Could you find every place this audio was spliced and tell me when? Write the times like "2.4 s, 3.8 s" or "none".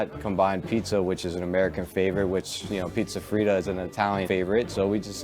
4.2 s